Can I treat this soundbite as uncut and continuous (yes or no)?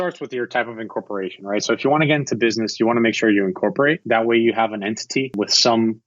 no